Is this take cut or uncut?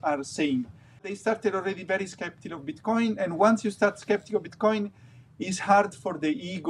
cut